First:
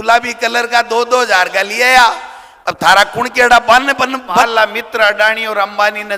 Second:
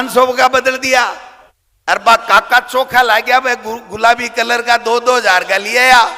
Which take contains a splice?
first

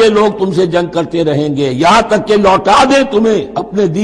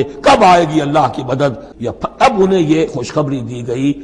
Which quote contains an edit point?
second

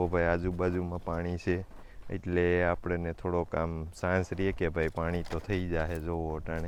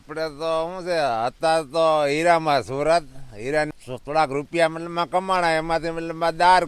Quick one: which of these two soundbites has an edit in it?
second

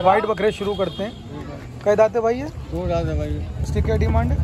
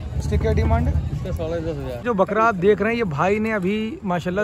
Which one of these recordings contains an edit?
second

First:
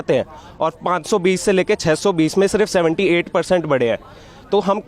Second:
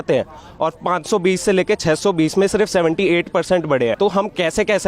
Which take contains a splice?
second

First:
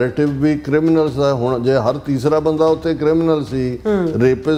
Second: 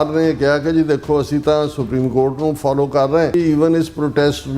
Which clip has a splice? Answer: second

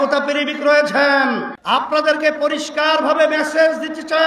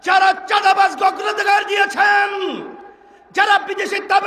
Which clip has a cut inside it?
first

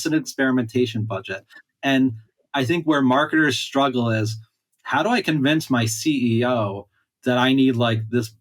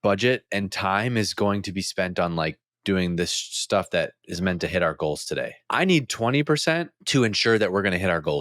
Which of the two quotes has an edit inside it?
second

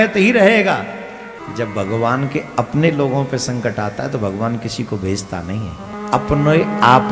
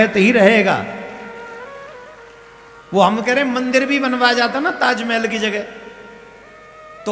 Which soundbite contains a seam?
first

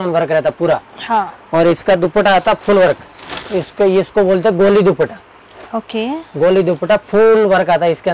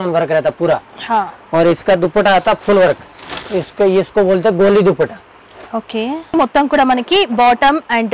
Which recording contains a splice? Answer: second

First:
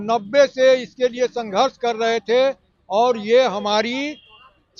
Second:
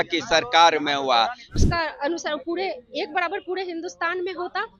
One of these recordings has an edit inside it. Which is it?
second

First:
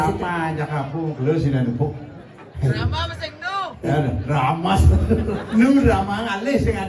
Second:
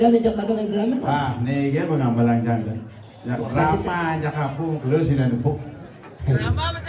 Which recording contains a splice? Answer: first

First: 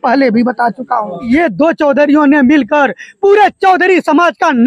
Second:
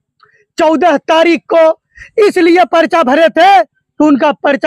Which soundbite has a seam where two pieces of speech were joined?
first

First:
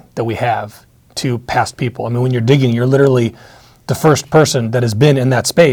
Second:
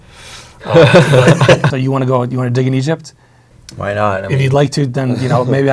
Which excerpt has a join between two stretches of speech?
second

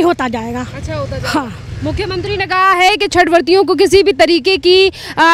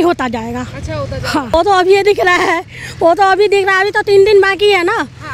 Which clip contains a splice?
second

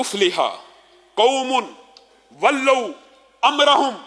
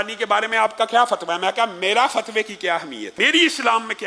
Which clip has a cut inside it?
second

